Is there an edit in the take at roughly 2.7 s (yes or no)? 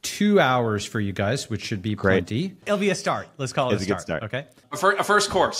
yes